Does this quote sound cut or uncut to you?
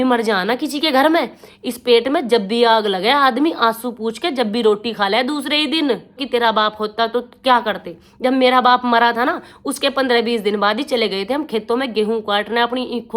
cut